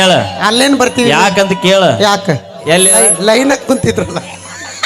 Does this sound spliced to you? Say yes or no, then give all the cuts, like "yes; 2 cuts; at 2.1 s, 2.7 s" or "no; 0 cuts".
yes; 1 cut; at 2.6 s